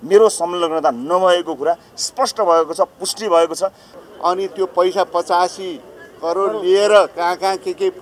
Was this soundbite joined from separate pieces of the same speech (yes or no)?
yes